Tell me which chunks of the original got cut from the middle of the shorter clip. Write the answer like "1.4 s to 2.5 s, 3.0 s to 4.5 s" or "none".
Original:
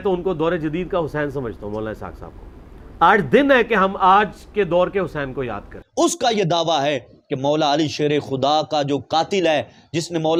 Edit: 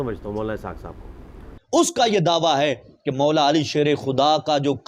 2.8 s to 5.7 s